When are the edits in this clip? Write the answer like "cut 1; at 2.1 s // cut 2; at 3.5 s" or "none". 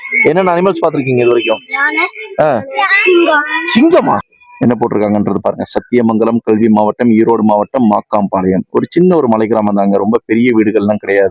cut 1; at 4.2 s